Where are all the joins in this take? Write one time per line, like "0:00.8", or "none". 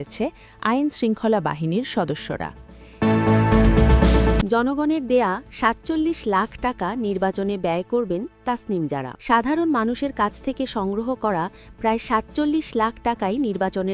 0:02.8
0:04.4
0:09.1